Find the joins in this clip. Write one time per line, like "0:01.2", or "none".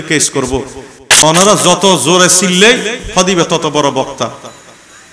0:01.2